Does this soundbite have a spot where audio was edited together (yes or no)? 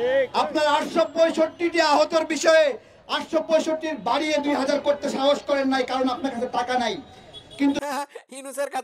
no